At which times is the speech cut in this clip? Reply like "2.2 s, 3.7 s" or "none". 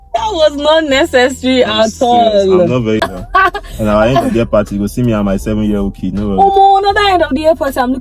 3.0 s